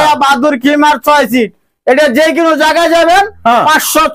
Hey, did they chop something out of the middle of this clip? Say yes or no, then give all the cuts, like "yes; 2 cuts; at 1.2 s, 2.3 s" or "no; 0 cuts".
no; 0 cuts